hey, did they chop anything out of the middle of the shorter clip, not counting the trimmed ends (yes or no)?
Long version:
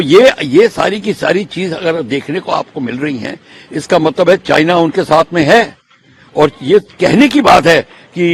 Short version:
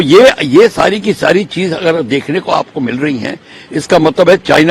no